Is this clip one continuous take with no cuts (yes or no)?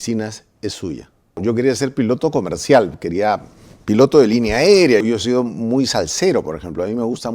no